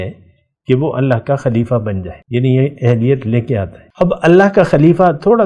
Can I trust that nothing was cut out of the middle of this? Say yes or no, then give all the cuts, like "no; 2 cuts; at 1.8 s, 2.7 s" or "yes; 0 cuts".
no; 2 cuts; at 2.1 s, 3.8 s